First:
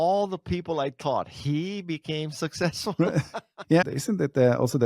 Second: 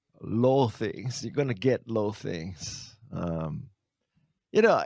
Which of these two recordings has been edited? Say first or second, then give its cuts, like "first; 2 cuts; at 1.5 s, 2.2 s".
first; 1 cut; at 3.8 s